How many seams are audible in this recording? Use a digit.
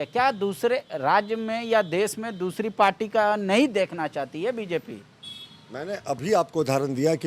0